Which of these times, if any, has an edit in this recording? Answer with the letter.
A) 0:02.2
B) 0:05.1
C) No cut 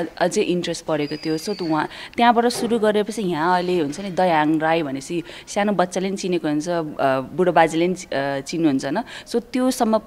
C